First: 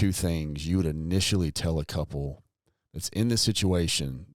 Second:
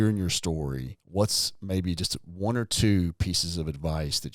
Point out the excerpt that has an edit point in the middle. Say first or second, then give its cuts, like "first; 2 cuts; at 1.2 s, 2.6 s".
second; 1 cut; at 0.9 s